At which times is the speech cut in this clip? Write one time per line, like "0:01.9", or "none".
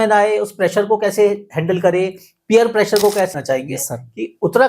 0:03.3